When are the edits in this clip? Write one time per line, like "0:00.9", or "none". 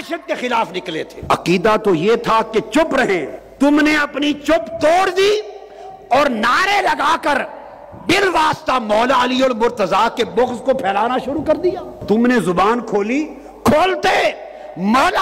0:01.1
0:03.4
0:12.0